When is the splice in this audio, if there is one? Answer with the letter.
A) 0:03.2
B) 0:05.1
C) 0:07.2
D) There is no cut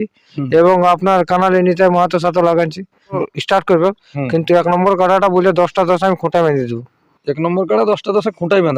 A